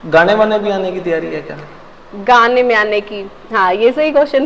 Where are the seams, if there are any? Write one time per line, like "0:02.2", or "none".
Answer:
none